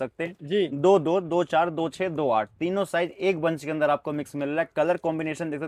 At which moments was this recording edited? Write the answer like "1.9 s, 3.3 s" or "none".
none